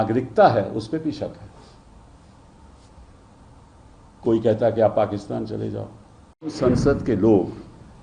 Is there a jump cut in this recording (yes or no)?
yes